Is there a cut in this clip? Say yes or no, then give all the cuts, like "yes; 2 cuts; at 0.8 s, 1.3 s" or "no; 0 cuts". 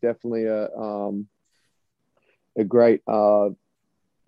no; 0 cuts